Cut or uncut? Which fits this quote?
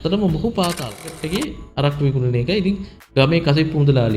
cut